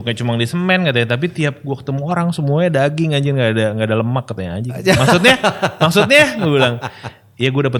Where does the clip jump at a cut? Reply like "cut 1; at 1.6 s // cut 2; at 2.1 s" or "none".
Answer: none